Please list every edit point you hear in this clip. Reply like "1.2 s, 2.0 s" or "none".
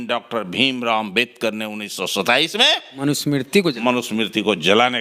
none